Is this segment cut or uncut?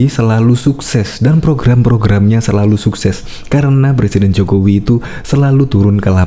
uncut